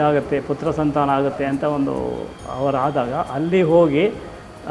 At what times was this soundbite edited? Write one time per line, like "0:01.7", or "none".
none